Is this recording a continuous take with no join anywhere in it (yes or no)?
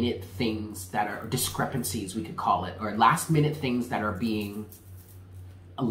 yes